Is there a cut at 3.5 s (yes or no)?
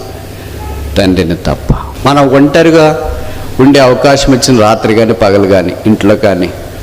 no